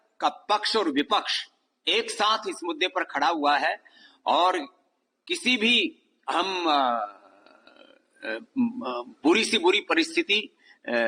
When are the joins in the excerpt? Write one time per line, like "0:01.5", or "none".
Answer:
none